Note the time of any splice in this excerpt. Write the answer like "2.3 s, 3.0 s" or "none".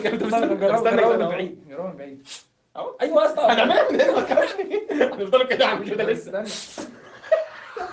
none